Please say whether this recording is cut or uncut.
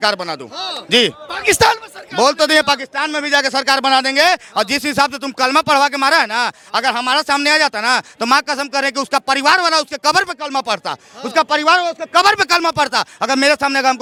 uncut